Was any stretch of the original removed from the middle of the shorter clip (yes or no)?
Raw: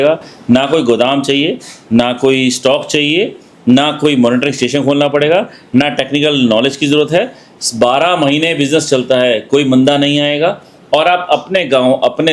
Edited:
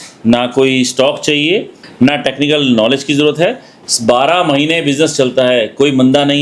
yes